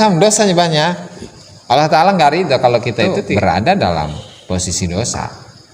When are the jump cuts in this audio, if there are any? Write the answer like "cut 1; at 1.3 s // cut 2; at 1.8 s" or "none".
cut 1; at 3.2 s